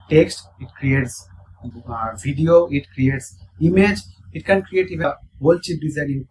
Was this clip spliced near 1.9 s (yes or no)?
no